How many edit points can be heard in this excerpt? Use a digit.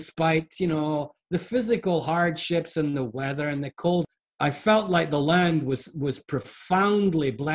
1